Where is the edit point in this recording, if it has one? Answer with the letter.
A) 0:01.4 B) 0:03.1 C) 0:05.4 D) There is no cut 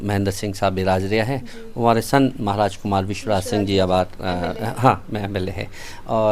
D